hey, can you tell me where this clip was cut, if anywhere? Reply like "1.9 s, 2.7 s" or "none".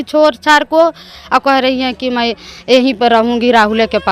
1.1 s